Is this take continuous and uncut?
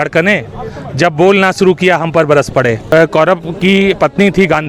no; 1 cut; at 2.9 s

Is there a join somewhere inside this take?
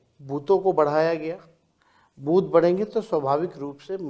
no; 0 cuts

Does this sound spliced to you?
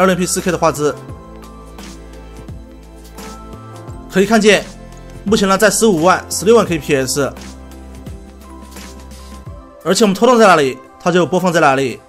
no; 0 cuts

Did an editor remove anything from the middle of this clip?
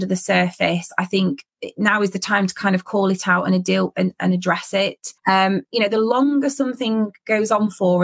yes; 1 cut; at 5.1 s

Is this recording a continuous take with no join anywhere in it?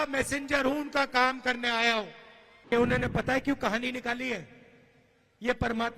no; 1 cut; at 2.7 s

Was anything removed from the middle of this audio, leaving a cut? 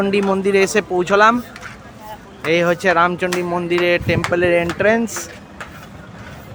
no; 0 cuts

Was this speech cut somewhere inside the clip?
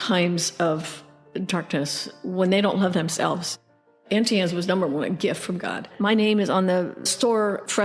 yes; 2 cuts; at 3.9 s, 5.9 s

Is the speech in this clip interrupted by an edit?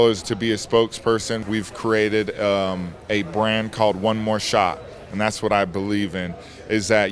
yes; 1 cut; at 1.4 s

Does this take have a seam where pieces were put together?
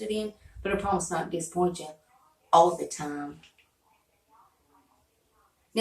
no; 0 cuts

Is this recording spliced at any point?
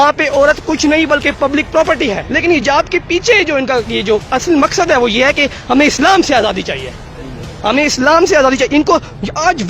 yes; 1 cut; at 2.4 s

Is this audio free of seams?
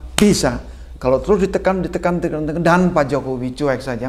yes; 0 cuts

